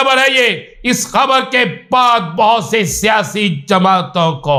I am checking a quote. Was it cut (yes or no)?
no